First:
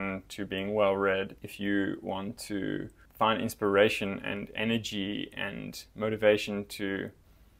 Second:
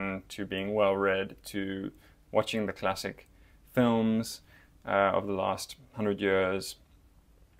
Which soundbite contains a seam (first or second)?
first